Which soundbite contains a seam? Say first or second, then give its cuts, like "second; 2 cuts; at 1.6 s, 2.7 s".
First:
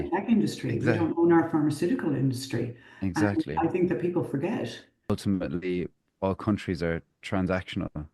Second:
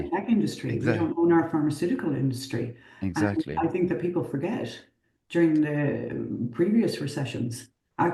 first; 1 cut; at 5.1 s